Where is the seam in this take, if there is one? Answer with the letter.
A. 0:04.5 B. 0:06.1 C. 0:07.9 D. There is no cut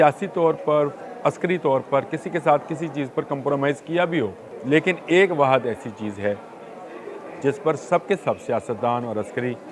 A